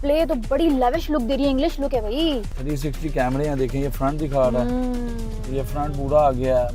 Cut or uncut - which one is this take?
cut